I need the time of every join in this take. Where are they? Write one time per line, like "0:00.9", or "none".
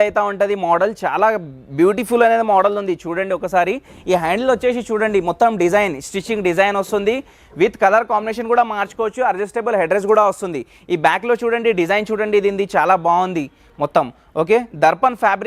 none